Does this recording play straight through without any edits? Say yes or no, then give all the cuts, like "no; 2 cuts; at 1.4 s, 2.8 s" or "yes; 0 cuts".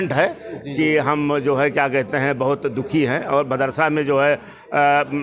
yes; 0 cuts